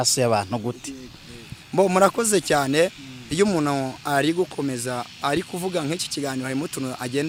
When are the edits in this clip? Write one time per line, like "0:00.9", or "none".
none